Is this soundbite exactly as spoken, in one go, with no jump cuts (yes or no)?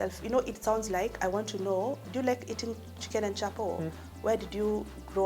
yes